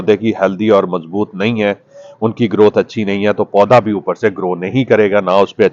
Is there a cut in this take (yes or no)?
no